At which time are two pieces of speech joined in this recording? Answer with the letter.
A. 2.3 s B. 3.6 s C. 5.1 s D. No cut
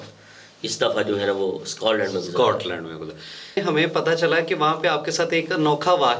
B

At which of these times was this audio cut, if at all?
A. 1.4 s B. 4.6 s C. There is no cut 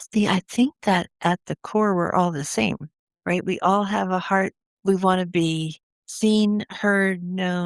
B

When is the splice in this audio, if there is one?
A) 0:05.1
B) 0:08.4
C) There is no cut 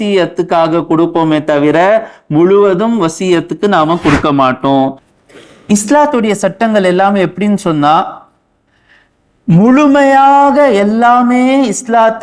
A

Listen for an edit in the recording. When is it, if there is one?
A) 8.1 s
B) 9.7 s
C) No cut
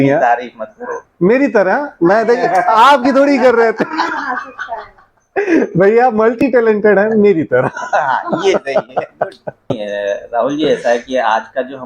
B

